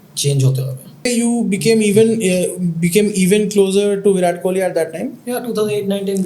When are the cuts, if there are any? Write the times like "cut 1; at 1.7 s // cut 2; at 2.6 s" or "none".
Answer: cut 1; at 1.1 s